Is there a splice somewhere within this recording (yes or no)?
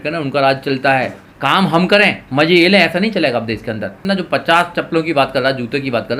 yes